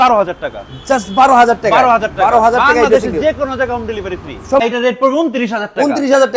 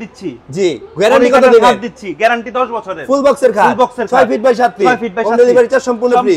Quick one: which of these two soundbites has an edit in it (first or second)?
first